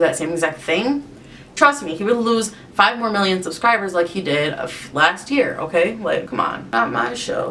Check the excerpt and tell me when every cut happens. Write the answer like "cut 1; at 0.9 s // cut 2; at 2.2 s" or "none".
cut 1; at 6.6 s